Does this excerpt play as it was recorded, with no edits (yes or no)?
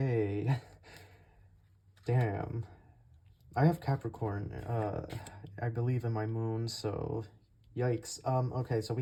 yes